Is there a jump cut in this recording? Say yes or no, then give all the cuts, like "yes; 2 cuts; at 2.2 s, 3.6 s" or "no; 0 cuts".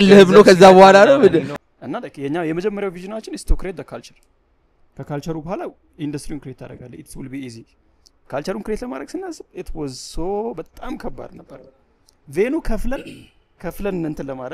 yes; 1 cut; at 1.6 s